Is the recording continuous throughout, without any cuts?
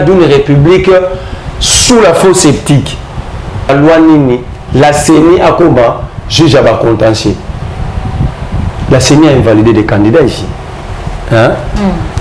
no; 1 cut; at 3.7 s

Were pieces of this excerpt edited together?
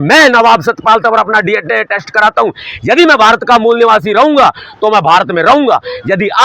no; 0 cuts

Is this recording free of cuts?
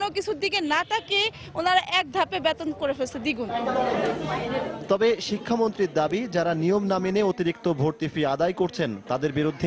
yes; 0 cuts

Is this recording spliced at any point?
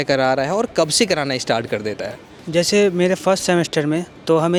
no; 0 cuts

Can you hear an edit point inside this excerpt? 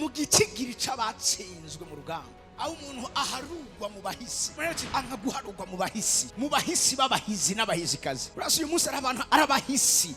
yes; 1 cut; at 2.5 s

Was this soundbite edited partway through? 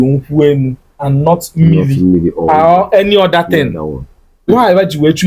no; 0 cuts

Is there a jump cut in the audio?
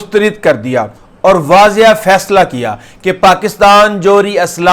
no; 0 cuts

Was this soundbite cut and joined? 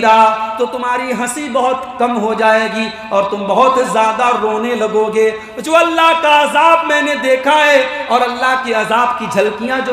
no; 0 cuts

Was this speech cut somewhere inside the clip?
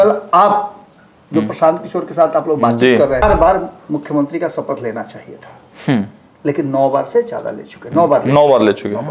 yes; 1 cut; at 3.2 s

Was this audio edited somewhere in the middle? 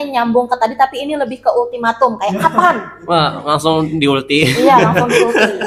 no; 0 cuts

